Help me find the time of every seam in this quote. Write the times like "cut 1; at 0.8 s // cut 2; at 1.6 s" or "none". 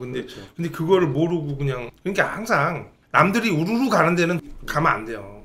cut 1; at 1.9 s // cut 2; at 2.9 s // cut 3; at 4.4 s